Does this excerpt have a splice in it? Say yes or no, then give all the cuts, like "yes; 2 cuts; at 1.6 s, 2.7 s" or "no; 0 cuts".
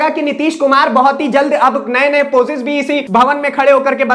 yes; 1 cut; at 3.0 s